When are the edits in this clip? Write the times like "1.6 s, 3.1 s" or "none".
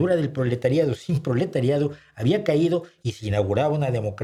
none